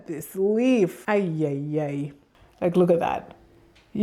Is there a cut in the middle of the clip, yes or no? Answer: yes